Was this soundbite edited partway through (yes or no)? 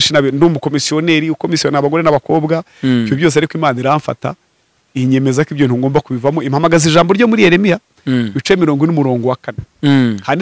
no